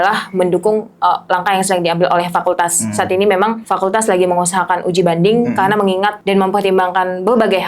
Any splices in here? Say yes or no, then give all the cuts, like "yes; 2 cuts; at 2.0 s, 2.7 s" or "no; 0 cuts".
yes; 2 cuts; at 3.6 s, 6.2 s